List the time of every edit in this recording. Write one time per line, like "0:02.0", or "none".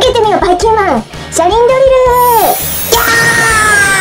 none